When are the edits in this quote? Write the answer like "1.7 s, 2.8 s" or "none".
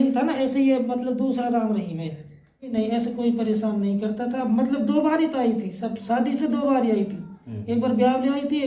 2.7 s